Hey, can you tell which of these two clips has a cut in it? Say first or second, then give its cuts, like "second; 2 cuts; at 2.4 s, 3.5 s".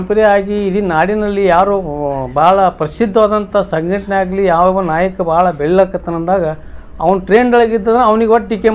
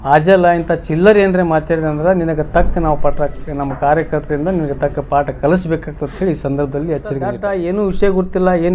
second; 1 cut; at 7.4 s